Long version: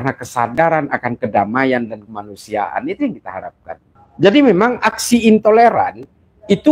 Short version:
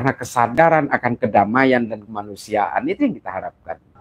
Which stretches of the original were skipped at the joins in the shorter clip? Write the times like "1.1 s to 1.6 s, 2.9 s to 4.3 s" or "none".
none